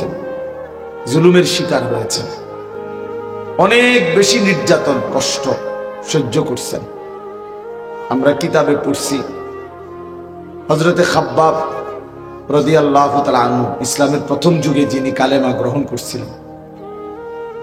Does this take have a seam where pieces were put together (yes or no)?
no